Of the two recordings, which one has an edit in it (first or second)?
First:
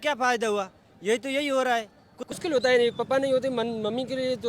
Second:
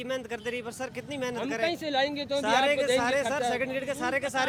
first